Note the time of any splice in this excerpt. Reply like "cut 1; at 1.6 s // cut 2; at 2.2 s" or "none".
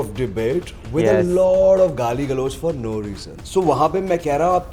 cut 1; at 3.3 s